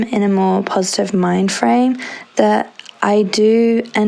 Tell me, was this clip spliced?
no; 0 cuts

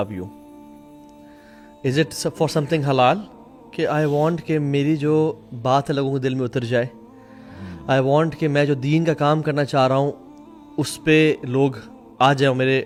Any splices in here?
no; 0 cuts

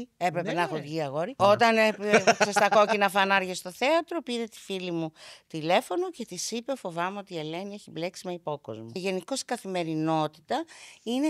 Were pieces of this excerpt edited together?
yes; 2 cuts; at 1.3 s, 8.9 s

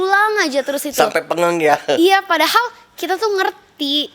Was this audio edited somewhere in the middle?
no; 0 cuts

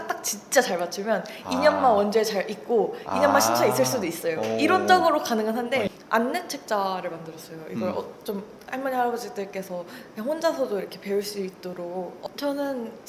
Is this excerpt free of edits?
no; 2 cuts; at 5.9 s, 12.2 s

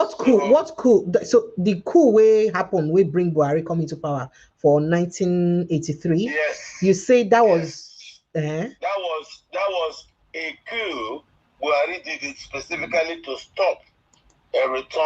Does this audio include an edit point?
no; 0 cuts

